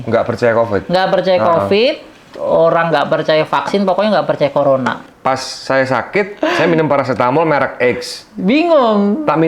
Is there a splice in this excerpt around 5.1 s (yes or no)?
yes